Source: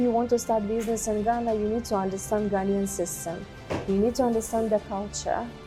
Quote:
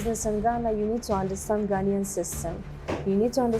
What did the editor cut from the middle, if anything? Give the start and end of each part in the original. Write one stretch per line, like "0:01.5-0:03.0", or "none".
none